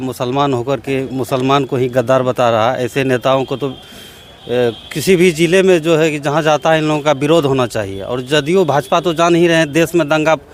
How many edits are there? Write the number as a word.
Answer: zero